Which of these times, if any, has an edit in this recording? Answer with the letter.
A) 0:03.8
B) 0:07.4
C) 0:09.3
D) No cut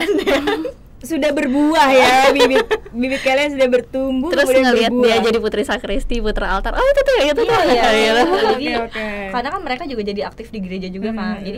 D